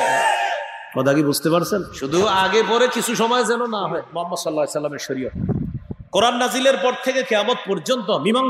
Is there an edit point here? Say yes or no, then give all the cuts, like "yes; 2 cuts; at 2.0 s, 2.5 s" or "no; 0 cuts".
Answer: yes; 1 cut; at 4.0 s